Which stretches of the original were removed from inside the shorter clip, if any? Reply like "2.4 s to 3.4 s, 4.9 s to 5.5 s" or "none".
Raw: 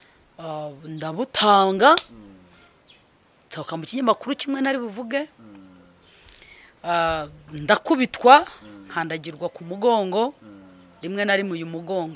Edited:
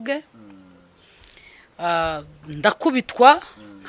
none